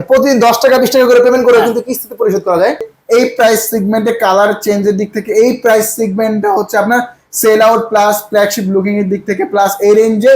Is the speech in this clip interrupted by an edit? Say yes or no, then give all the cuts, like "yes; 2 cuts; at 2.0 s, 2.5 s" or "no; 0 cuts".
yes; 1 cut; at 2.8 s